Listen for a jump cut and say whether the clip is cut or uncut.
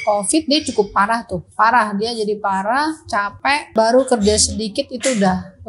cut